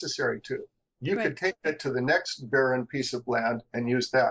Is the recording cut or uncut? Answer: uncut